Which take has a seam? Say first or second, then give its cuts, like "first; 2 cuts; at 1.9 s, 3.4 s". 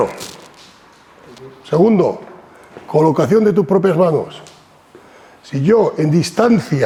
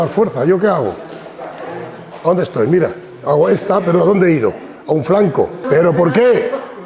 second; 1 cut; at 5.7 s